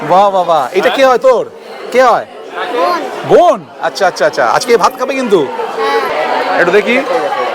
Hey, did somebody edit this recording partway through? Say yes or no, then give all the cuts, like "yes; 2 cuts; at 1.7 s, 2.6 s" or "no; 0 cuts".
yes; 1 cut; at 6.1 s